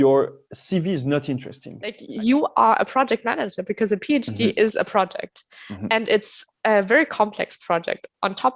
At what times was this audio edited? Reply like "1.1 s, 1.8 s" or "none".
2.0 s